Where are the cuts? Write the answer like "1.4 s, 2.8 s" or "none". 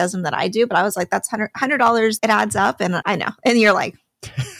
2.2 s, 3.0 s